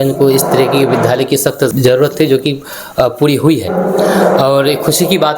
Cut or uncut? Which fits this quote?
cut